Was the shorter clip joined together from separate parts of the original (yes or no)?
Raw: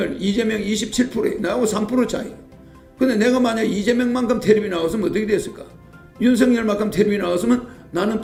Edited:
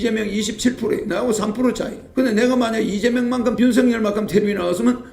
yes